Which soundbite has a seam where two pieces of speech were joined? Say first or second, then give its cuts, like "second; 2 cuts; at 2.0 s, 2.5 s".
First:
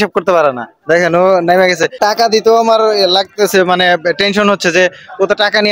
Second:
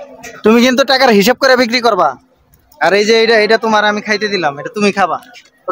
first; 1 cut; at 2.0 s